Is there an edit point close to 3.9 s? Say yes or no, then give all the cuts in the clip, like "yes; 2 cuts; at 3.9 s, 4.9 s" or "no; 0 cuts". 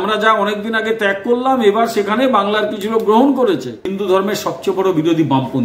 yes; 1 cut; at 3.9 s